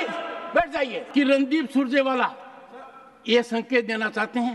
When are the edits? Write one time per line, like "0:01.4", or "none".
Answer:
0:01.0